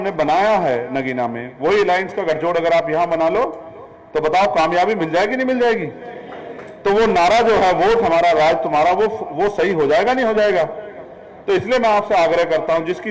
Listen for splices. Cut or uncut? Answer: uncut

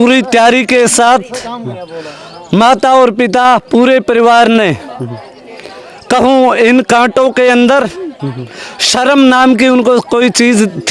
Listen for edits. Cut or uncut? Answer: uncut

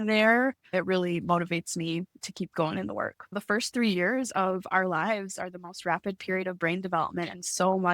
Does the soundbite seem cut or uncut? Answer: cut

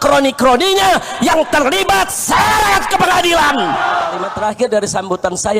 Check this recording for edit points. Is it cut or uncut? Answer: cut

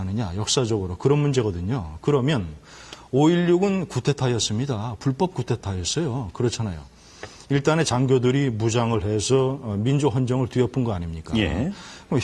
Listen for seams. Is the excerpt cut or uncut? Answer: uncut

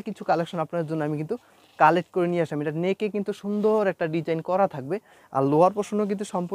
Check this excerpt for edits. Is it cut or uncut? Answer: uncut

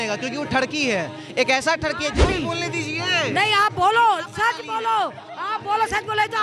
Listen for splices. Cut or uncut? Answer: cut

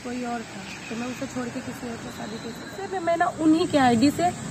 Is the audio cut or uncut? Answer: cut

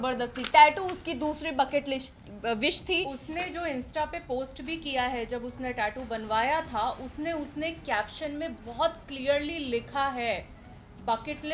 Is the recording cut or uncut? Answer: uncut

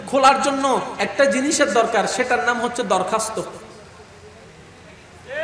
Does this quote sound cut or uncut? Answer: uncut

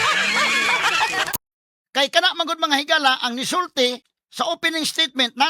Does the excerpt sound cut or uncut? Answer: cut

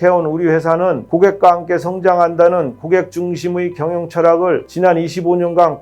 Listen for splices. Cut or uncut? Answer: cut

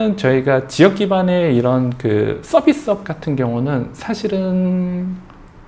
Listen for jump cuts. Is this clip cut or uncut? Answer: uncut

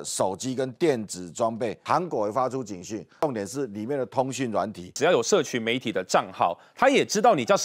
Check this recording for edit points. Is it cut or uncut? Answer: cut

